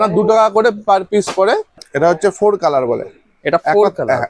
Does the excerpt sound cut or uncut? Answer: cut